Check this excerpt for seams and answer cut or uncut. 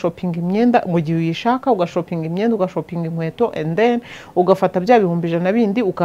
uncut